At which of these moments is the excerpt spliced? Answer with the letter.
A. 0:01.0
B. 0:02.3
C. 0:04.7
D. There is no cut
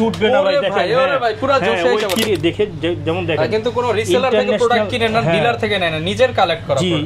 B